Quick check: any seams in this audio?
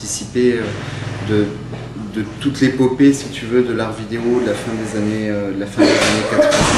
yes; 1 cut; at 2.8 s

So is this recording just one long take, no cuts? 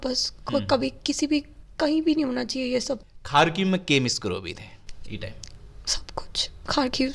no; 1 cut; at 3.1 s

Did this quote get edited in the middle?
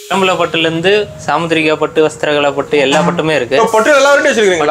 no; 0 cuts

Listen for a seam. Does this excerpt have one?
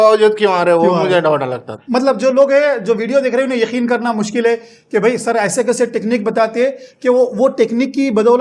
yes; 1 cut; at 1.6 s

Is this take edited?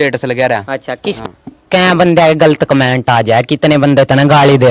yes; 1 cut; at 1.2 s

